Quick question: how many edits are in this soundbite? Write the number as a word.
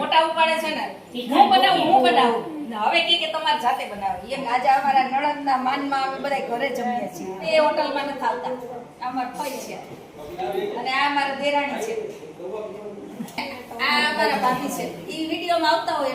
three